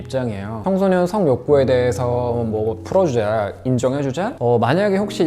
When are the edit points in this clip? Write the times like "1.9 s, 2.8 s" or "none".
4.3 s